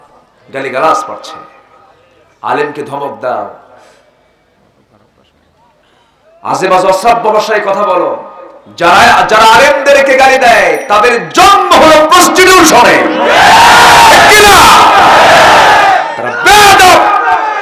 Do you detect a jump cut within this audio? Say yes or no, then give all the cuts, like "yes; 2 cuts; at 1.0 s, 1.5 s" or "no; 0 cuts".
no; 0 cuts